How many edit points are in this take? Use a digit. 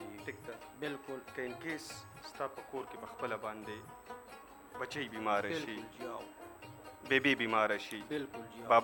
0